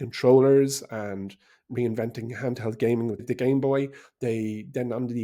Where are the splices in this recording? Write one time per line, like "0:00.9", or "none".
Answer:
0:03.2